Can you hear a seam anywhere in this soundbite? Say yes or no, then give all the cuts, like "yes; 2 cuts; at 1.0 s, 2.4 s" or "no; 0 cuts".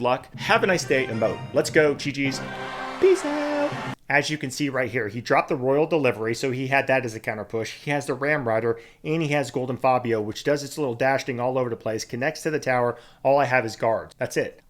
yes; 1 cut; at 3.9 s